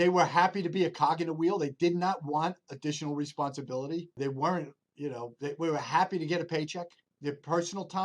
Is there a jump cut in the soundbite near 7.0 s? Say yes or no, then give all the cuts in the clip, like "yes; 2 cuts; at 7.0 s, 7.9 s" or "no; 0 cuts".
yes; 2 cuts; at 4.2 s, 7.0 s